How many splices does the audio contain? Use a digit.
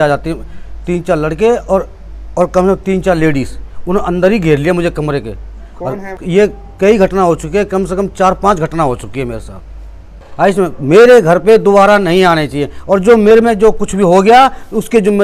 2